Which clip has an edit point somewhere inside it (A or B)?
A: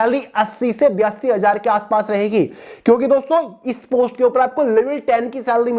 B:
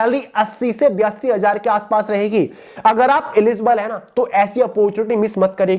B